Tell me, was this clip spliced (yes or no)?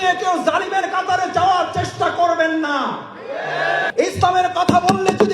yes